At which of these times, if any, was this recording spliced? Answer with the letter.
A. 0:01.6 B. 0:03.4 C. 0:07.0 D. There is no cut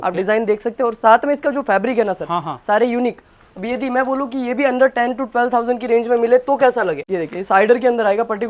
C